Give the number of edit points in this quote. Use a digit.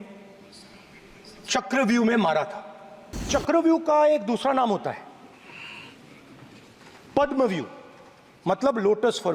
1